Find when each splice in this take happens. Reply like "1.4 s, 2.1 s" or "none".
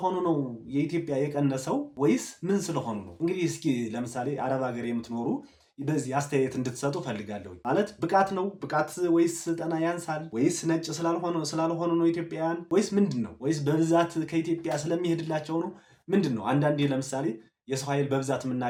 none